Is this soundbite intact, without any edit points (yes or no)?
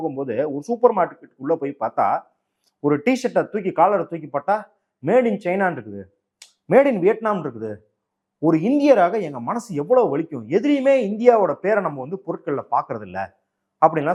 yes